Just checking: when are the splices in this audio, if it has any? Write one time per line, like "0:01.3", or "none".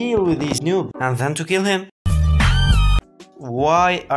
0:03.0